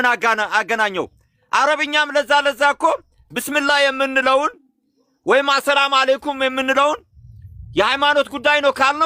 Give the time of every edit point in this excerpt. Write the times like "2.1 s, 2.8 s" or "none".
none